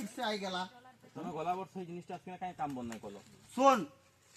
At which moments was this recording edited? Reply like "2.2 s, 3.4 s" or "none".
none